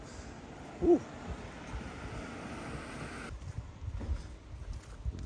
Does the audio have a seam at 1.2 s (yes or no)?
no